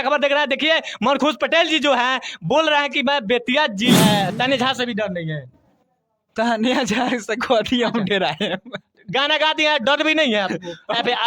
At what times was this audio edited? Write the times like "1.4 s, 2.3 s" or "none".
3.9 s